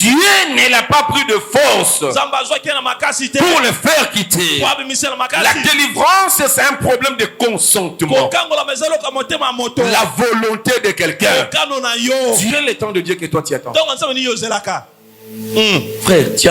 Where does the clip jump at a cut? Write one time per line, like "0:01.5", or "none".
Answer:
0:12.5